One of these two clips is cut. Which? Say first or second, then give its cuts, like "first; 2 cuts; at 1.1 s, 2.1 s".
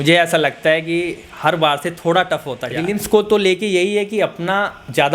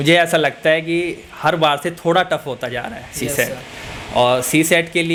first; 1 cut; at 2.9 s